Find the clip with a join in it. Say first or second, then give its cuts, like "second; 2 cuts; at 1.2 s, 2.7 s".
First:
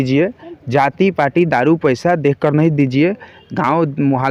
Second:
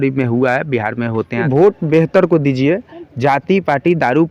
second; 1 cut; at 1.4 s